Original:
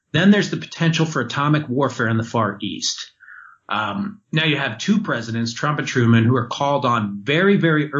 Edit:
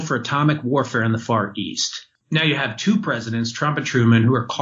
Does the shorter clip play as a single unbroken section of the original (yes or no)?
no